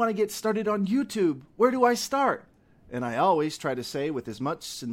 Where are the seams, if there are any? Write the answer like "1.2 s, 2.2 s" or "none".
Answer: none